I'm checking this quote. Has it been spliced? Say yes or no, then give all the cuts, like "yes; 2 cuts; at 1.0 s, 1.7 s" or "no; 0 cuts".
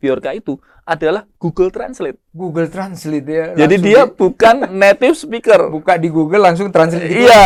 no; 0 cuts